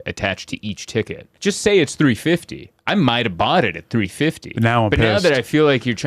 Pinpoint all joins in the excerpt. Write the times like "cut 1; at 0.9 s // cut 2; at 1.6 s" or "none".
cut 1; at 1.3 s